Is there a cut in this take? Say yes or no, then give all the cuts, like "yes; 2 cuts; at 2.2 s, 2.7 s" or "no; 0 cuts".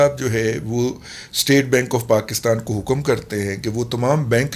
no; 0 cuts